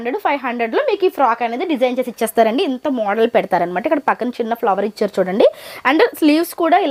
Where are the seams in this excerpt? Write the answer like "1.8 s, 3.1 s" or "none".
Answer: none